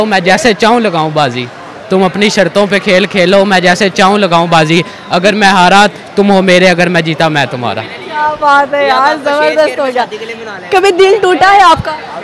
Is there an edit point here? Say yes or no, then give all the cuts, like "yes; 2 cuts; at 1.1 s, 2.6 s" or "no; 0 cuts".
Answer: no; 0 cuts